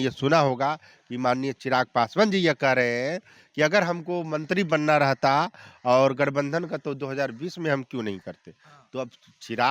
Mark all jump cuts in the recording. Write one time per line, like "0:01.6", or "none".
none